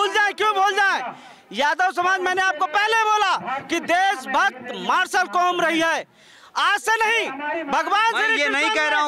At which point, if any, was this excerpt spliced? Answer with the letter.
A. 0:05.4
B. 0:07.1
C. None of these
C